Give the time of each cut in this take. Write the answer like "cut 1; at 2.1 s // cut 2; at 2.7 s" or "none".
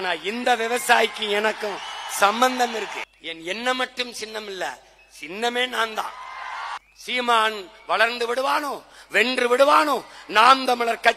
cut 1; at 3.0 s // cut 2; at 6.8 s